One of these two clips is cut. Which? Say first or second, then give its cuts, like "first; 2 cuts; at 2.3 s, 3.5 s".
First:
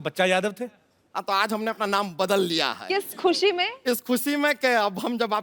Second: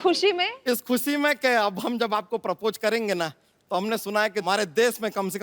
second; 1 cut; at 4.4 s